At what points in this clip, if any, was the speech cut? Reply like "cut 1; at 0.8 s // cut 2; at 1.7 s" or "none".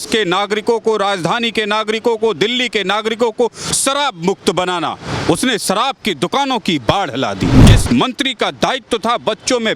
cut 1; at 7.8 s